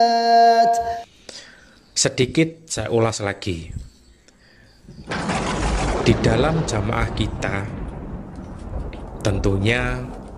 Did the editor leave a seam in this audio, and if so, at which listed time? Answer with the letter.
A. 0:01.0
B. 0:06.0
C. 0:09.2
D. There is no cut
A